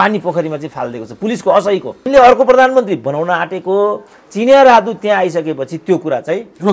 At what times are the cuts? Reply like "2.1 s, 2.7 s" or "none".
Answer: 2.0 s